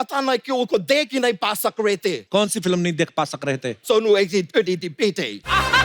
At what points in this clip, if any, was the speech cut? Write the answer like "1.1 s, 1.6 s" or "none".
2.2 s, 3.8 s